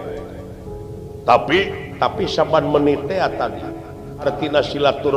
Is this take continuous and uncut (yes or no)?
no